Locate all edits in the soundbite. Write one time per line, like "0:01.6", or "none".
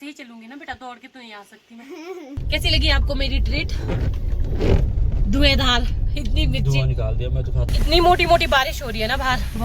0:02.4
0:07.7